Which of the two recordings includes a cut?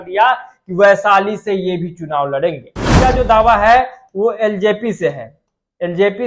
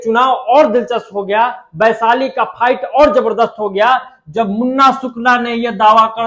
first; 1 cut; at 3.0 s

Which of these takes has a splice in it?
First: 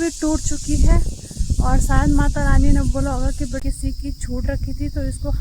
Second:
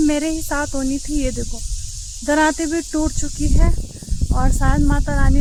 first; 1 cut; at 3.6 s

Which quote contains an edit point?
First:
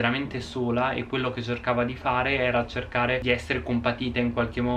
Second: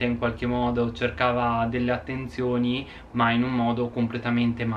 first; 1 cut; at 3.2 s

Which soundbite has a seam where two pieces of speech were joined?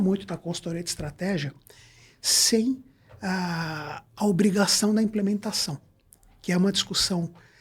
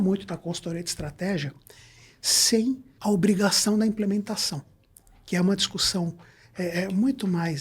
second; 1 cut; at 2.9 s

